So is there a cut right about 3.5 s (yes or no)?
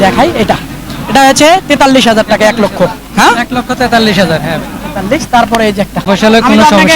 no